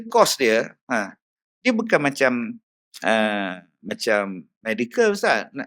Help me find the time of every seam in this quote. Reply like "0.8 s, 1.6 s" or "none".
none